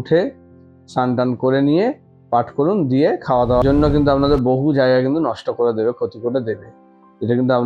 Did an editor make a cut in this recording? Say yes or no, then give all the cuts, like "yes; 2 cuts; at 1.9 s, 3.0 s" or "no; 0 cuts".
yes; 1 cut; at 3.6 s